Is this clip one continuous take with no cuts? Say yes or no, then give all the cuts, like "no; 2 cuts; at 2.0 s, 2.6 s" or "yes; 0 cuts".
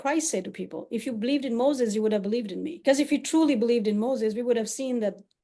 no; 1 cut; at 2.7 s